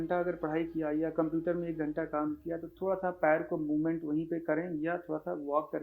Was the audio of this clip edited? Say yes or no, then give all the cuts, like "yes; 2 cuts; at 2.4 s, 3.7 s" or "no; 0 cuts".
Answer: no; 0 cuts